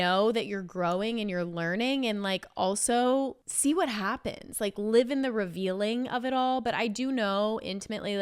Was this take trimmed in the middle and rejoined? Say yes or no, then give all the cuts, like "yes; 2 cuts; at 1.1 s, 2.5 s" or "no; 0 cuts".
yes; 1 cut; at 3.4 s